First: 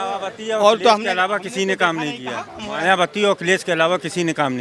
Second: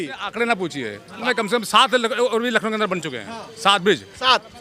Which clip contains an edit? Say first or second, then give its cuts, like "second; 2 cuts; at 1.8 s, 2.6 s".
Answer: second; 1 cut; at 1.2 s